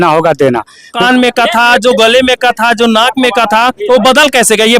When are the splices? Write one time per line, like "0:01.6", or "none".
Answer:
0:01.0

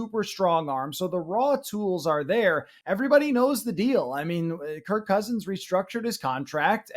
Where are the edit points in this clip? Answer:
0:02.7

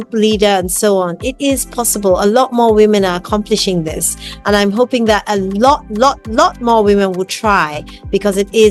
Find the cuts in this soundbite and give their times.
none

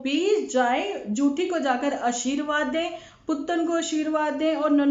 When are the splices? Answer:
none

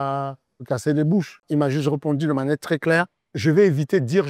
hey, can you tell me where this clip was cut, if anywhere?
0:01.4
0:03.2

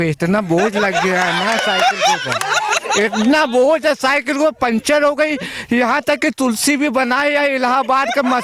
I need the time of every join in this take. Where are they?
none

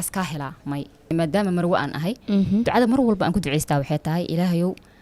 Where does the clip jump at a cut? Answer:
0:01.1

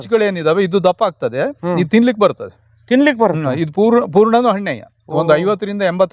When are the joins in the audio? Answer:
none

